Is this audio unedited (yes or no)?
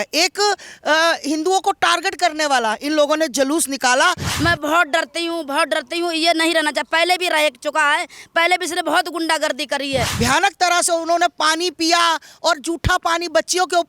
no